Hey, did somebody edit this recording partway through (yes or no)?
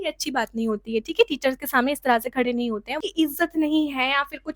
yes